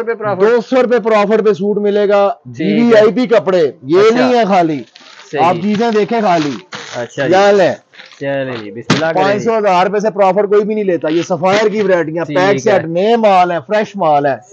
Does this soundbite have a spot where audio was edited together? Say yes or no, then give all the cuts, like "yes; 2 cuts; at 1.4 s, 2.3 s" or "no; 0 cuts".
no; 0 cuts